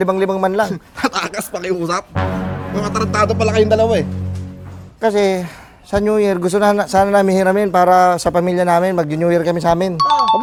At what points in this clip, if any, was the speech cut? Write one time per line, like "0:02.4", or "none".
none

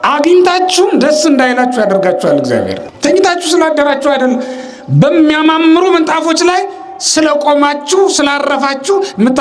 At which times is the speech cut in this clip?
0:02.8

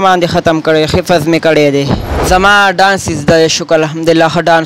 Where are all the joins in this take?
0:02.1

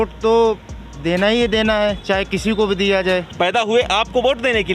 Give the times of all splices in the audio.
0:03.3

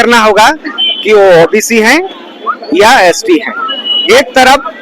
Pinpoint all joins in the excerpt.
none

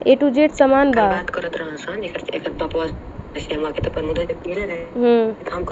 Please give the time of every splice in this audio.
none

